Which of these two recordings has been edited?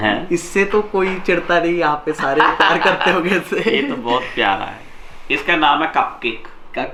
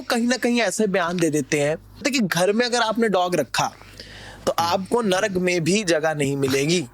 second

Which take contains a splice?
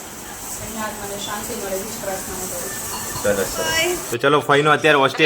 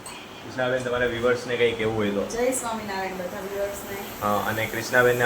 first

